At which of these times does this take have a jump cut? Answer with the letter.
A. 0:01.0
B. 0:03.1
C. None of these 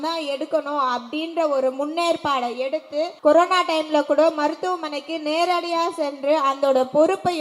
B